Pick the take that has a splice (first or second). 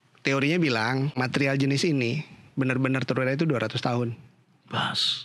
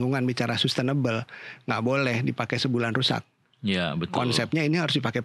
first